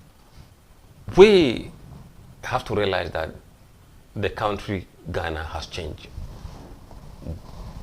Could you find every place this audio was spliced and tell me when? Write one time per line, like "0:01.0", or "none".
0:01.1